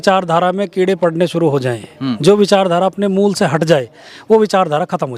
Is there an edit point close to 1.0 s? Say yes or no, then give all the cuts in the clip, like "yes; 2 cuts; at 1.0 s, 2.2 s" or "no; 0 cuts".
no; 0 cuts